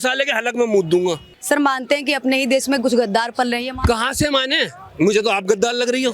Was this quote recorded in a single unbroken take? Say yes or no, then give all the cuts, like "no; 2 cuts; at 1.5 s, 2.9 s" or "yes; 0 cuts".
no; 1 cut; at 1.3 s